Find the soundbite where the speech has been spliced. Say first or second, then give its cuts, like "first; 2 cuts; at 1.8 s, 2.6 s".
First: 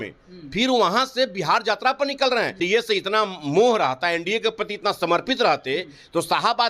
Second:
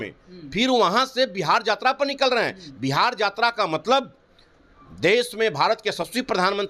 first; 1 cut; at 2.6 s